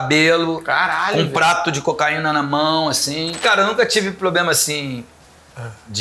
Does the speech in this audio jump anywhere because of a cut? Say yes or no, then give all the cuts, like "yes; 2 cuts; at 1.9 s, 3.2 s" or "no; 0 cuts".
yes; 1 cut; at 3.4 s